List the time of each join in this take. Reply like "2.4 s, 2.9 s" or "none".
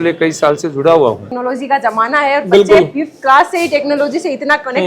1.3 s